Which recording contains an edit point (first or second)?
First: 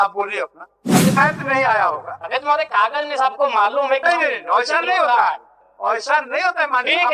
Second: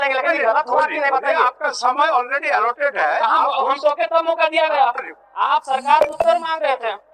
first